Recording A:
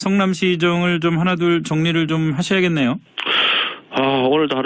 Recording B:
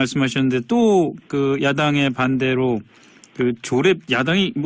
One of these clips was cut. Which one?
A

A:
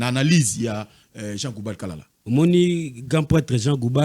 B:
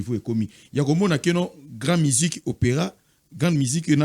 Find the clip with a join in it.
A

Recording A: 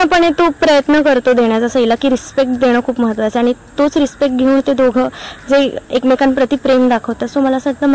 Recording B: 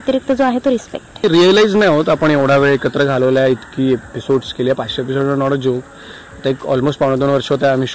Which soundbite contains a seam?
B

